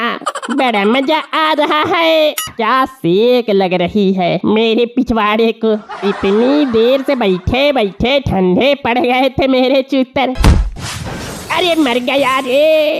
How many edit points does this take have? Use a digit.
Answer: 2